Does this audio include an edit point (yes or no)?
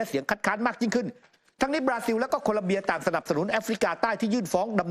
yes